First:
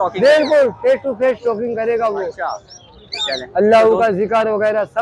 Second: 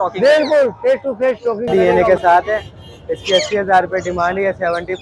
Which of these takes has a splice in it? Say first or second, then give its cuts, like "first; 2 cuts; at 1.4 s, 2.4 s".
second; 1 cut; at 1.7 s